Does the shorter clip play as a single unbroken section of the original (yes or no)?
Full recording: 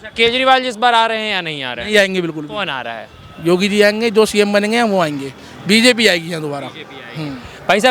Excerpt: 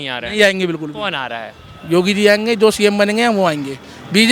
yes